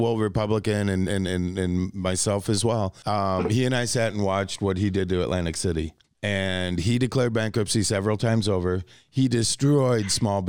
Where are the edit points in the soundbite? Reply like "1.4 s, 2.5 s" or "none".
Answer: 3.0 s, 6.0 s